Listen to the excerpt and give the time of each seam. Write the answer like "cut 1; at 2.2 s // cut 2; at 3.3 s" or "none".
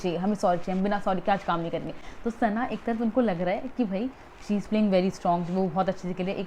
none